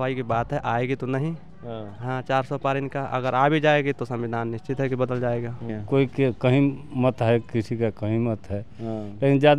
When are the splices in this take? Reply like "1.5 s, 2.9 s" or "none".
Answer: 5.7 s